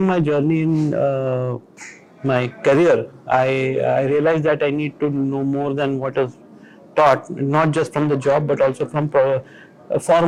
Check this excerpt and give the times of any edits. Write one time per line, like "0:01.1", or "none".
none